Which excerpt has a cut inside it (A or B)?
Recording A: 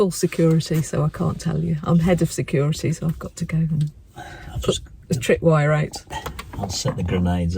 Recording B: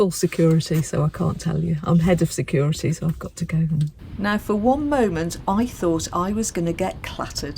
B